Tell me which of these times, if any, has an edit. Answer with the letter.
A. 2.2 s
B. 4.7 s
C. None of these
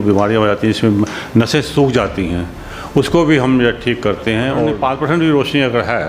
B